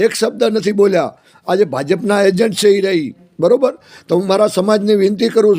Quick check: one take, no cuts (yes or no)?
yes